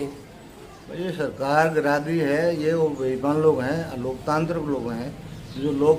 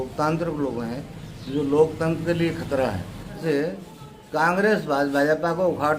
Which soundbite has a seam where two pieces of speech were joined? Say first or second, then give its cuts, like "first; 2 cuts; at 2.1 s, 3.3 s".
second; 1 cut; at 3.4 s